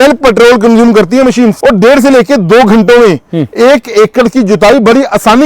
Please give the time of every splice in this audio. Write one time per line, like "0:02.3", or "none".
0:01.6